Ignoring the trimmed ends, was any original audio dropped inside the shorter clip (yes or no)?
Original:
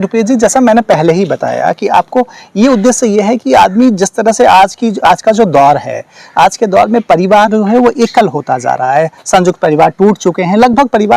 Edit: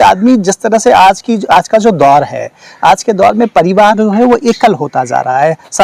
no